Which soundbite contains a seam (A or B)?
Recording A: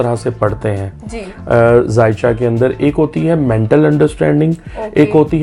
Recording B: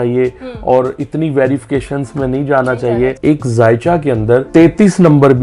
B